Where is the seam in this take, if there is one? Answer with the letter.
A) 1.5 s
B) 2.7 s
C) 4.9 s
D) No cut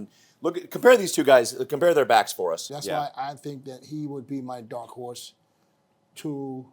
B